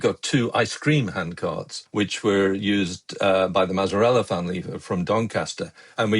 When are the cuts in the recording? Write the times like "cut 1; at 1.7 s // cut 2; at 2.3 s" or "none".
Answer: cut 1; at 1.8 s